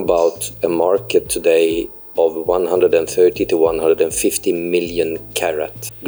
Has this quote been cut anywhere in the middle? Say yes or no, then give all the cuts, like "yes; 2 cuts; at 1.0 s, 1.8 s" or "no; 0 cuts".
no; 0 cuts